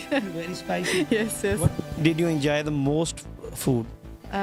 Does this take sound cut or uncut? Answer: uncut